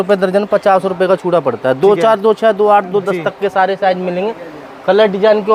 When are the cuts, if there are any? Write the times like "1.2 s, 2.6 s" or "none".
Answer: none